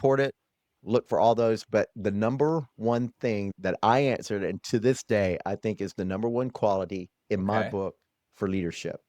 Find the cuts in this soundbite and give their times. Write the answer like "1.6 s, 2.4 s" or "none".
none